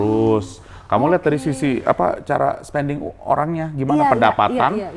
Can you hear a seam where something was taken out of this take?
no; 0 cuts

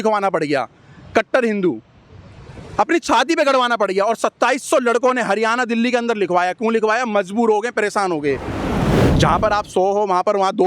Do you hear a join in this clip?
yes; 1 cut; at 8.7 s

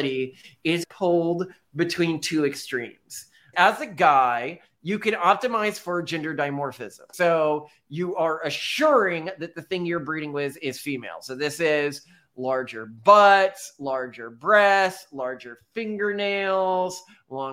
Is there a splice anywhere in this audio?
yes; 3 cuts; at 0.8 s, 3.5 s, 7.1 s

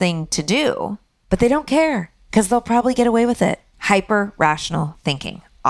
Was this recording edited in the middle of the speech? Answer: no; 0 cuts

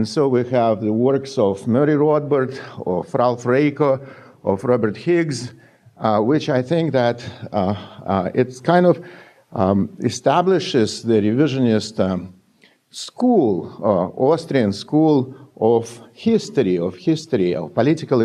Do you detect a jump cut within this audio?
yes; 1 cut; at 16.4 s

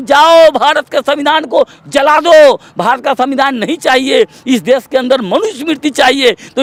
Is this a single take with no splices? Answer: yes; 0 cuts

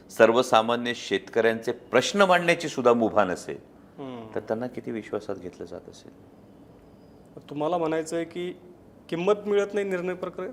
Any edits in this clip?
no; 0 cuts

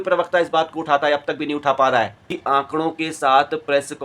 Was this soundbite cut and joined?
yes; 1 cut; at 2.3 s

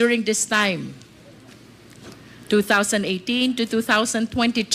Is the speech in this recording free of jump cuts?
yes; 0 cuts

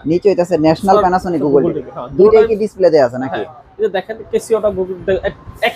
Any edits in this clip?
no; 0 cuts

